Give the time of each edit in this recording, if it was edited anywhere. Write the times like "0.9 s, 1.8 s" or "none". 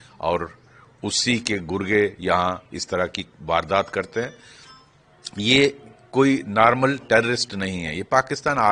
none